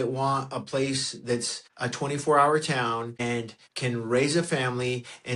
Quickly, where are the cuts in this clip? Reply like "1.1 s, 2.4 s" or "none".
1.6 s, 3.2 s